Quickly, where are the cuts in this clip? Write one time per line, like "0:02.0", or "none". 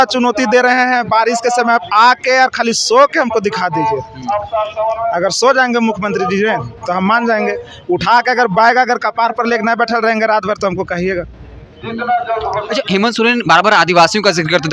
none